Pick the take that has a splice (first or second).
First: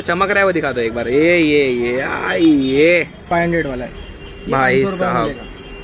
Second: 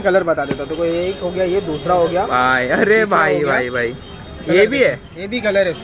first